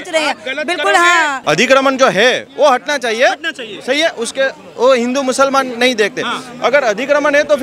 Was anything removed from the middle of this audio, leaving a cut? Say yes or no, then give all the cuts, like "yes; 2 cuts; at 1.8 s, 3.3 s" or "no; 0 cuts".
yes; 1 cut; at 1.4 s